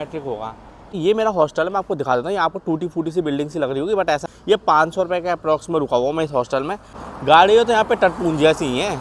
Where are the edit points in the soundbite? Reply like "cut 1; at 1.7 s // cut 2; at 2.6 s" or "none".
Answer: cut 1; at 0.9 s // cut 2; at 4.2 s // cut 3; at 7.1 s